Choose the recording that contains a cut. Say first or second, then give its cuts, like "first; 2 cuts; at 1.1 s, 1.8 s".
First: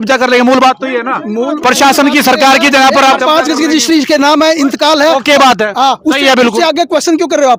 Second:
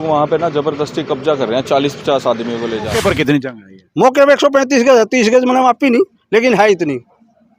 second; 1 cut; at 2.9 s